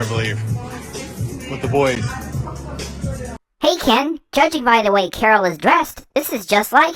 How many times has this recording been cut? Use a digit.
0